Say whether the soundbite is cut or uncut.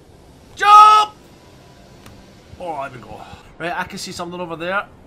cut